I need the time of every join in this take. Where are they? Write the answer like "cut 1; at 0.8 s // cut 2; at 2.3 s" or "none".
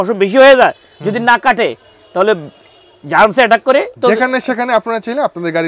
cut 1; at 3.9 s